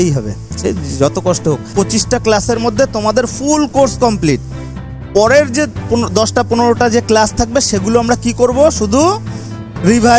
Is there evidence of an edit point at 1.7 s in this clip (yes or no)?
yes